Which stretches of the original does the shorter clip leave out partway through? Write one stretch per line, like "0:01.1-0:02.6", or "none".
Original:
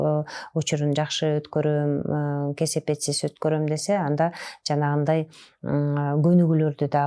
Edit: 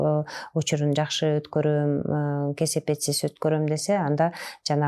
none

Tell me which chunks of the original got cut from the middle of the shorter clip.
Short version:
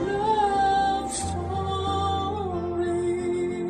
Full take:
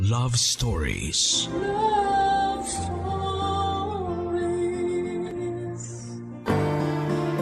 none

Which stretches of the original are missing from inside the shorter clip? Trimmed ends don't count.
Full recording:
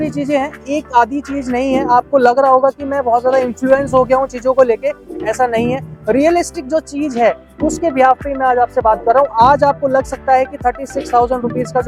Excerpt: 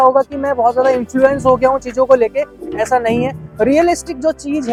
none

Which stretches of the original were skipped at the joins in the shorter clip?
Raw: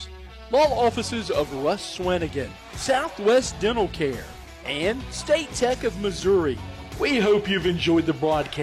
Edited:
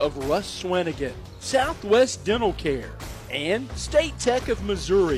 none

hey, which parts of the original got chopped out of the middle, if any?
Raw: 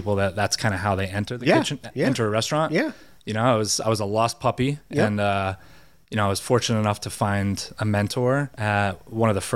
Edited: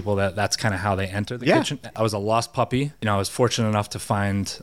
0:01.9-0:03.7
0:04.8-0:06.0

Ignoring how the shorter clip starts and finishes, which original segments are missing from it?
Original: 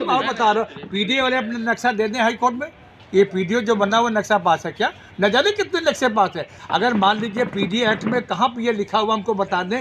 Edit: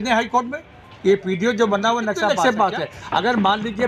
0:04.4-0:05.9

